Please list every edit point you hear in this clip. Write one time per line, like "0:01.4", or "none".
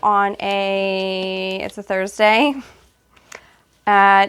none